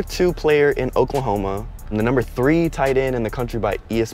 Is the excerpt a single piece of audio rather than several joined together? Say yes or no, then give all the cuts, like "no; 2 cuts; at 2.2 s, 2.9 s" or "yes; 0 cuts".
no; 1 cut; at 1.9 s